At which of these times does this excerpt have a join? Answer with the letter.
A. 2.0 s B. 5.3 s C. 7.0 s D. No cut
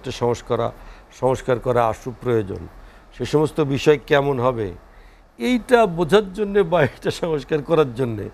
D